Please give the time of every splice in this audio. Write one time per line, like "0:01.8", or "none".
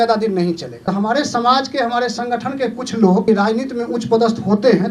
0:00.9
0:03.2